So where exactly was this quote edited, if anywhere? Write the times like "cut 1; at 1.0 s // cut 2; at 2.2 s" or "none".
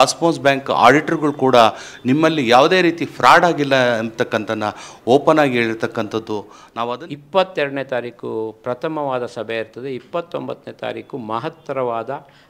cut 1; at 6.6 s